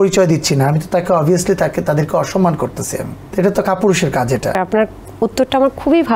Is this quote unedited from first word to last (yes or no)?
no